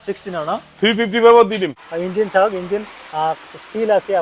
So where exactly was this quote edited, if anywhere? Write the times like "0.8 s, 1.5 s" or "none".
1.8 s